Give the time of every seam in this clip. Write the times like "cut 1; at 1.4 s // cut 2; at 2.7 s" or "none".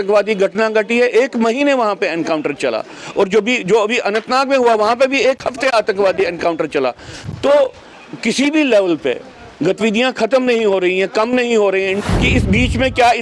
cut 1; at 12.0 s